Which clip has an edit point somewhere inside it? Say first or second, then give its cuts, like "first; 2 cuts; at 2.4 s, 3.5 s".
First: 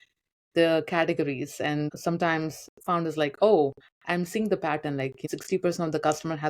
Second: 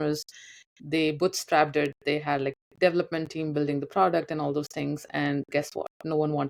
first; 2 cuts; at 1.9 s, 5.2 s